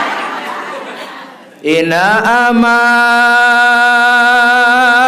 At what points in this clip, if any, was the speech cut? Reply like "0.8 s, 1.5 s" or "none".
1.1 s